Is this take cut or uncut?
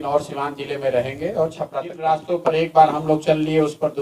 cut